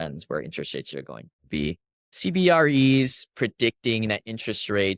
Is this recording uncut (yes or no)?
yes